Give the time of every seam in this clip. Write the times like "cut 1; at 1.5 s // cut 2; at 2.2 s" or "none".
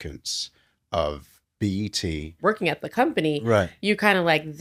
cut 1; at 2.4 s